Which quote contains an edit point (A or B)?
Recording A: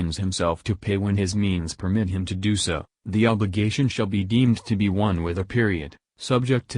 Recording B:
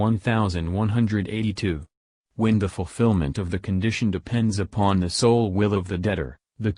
B